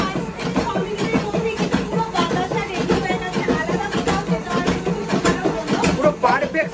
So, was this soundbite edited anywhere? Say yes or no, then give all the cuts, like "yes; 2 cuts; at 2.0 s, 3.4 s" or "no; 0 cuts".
no; 0 cuts